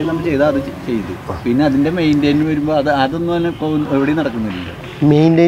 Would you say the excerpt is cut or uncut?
uncut